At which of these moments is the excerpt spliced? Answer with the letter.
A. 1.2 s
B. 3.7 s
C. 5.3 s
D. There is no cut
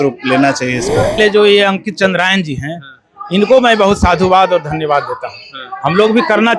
A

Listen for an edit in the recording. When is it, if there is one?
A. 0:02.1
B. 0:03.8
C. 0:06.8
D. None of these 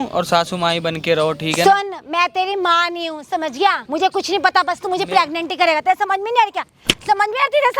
B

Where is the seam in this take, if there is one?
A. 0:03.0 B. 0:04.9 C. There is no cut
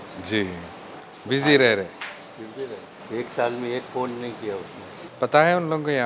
A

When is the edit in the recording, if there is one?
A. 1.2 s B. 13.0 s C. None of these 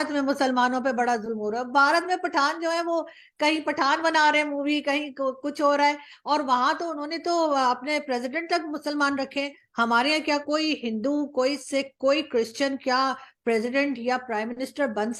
C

